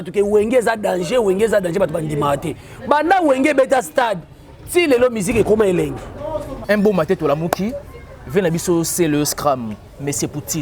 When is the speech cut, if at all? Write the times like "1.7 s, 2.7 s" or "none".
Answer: 6.6 s